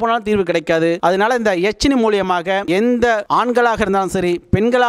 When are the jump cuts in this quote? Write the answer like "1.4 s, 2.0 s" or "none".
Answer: 1.0 s